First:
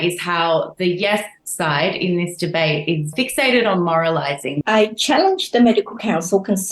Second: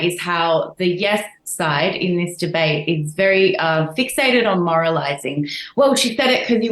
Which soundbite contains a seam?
first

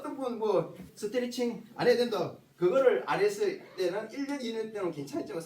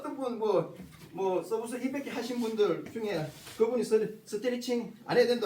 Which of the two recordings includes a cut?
first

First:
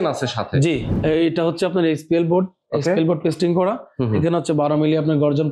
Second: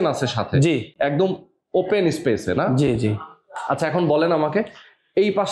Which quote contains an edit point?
first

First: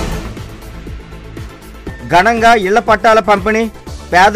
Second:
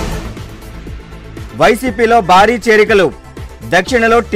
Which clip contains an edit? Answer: first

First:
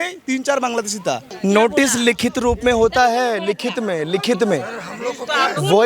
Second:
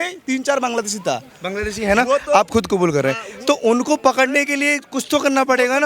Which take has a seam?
first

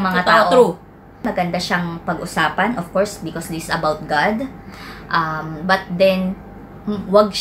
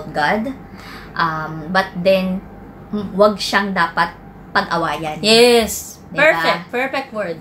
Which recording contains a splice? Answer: first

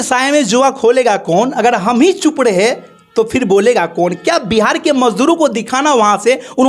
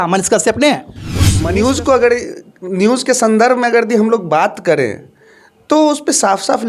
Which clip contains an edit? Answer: second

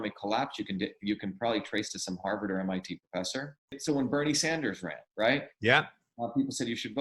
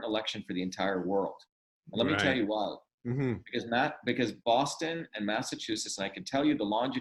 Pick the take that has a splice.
first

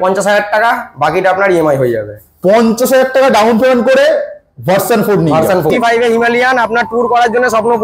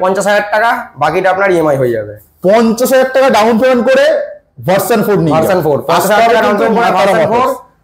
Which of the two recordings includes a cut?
first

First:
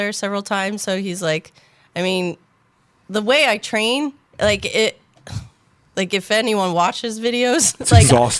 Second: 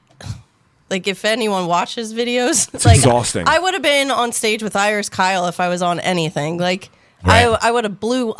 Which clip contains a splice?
second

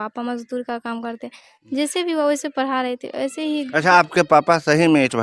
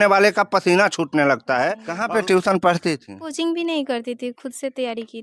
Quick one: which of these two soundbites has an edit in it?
second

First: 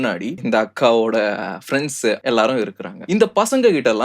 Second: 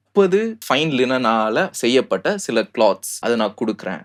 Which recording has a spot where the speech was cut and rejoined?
first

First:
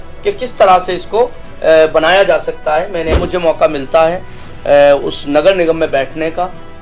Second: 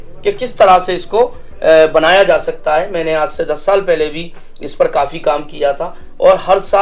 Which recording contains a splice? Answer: first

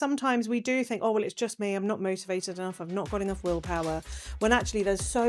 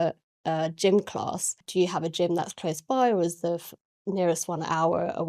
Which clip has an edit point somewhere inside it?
second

